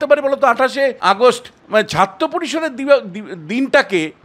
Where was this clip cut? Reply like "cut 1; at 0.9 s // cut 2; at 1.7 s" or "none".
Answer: cut 1; at 1.0 s // cut 2; at 1.5 s